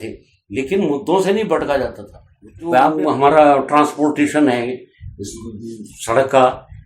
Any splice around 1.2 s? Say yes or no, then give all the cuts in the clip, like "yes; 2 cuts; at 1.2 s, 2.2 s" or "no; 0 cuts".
no; 1 cut; at 2.7 s